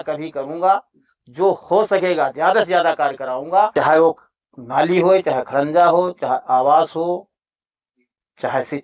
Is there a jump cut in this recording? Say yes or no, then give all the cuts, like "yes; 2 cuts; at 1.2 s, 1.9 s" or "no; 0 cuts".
yes; 1 cut; at 3.7 s